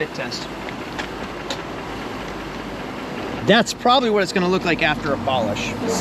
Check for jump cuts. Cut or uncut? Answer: uncut